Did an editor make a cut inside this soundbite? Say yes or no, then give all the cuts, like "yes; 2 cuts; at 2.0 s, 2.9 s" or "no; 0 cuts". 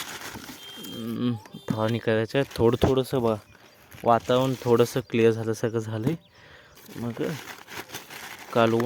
no; 0 cuts